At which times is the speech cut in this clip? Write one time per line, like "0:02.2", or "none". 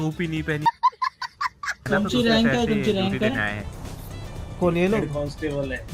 0:01.9

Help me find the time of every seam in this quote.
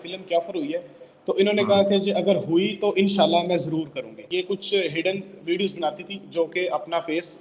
0:04.2

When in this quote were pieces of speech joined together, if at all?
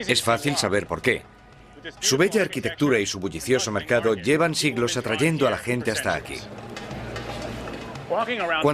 0:04.2

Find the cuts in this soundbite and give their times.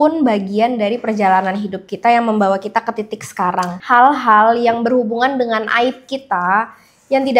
0:03.8

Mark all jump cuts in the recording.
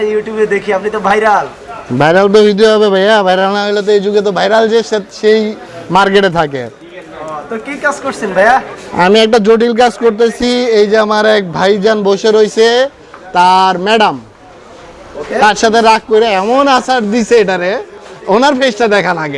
none

